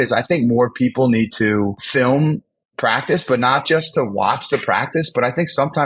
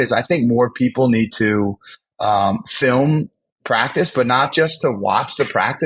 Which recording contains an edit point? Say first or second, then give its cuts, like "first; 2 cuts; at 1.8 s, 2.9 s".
first; 1 cut; at 1.8 s